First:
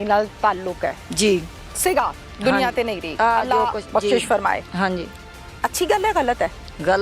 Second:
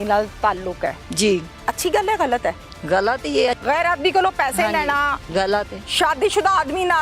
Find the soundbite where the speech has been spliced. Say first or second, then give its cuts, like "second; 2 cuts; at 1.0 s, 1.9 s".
second; 3 cuts; at 1.5 s, 3.6 s, 5.3 s